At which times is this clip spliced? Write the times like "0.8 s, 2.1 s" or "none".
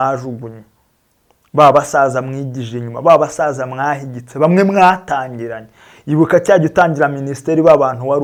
none